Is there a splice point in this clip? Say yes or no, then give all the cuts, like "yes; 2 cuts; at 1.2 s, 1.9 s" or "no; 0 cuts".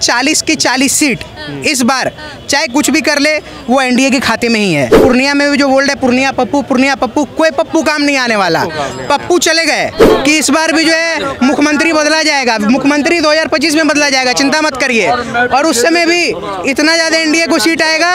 yes; 2 cuts; at 5.0 s, 10.0 s